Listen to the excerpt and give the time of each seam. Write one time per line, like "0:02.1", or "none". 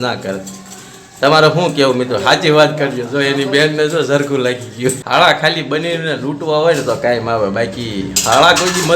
0:05.0